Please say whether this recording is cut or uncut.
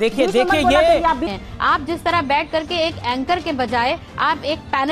cut